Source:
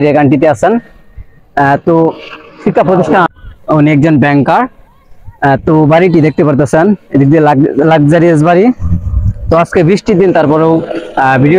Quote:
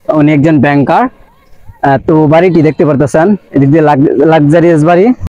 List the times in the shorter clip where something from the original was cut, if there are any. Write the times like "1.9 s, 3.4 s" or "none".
none